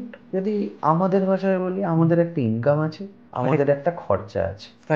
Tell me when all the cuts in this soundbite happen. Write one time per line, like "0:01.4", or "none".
none